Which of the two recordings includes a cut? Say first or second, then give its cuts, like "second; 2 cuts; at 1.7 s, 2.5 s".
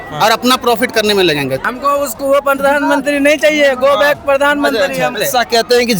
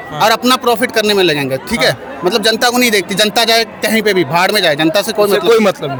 first; 2 cuts; at 1.7 s, 5.2 s